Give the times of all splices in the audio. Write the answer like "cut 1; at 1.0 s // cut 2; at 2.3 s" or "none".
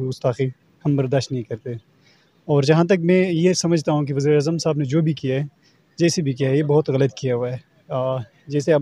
none